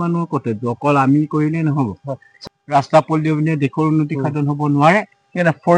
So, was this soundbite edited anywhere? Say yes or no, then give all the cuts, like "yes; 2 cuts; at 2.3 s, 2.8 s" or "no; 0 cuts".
yes; 1 cut; at 2.3 s